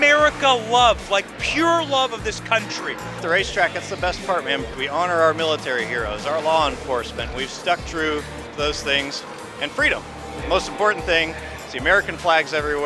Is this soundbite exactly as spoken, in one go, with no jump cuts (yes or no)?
no